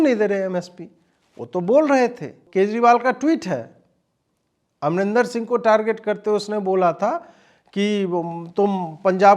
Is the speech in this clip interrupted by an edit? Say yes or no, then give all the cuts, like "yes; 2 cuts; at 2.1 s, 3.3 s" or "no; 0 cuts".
yes; 1 cut; at 2.4 s